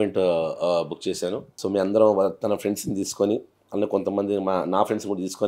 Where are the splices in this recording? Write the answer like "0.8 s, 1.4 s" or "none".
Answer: 1.5 s